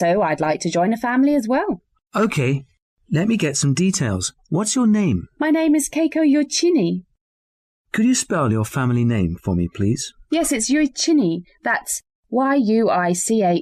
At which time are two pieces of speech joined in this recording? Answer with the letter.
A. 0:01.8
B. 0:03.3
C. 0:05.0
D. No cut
D